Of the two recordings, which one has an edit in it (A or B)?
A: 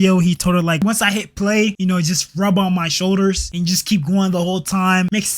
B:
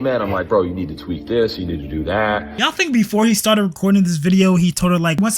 B